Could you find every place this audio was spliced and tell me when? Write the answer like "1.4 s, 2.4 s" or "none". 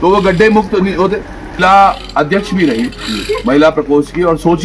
1.6 s